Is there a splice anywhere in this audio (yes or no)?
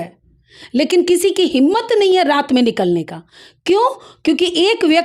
no